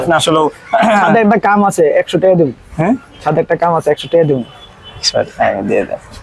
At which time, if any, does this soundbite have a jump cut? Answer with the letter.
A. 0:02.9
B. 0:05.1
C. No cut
C